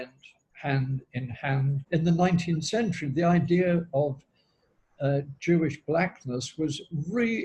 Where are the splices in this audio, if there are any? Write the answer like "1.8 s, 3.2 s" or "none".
1.8 s